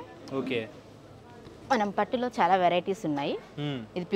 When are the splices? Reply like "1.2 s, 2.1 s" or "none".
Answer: none